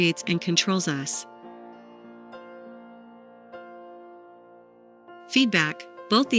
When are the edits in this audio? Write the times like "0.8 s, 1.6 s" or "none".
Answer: 1.2 s, 5.3 s